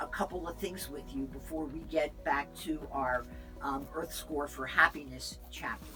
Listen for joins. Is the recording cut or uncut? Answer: uncut